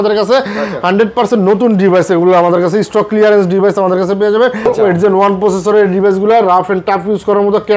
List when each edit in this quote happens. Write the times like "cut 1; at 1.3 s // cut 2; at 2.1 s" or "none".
cut 1; at 4.7 s